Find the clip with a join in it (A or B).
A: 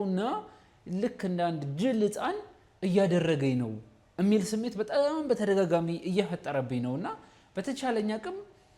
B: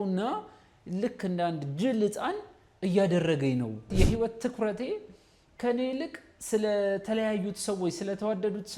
B